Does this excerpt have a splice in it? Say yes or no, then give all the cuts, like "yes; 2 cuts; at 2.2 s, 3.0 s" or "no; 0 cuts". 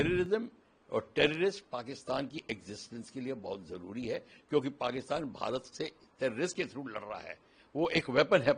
no; 0 cuts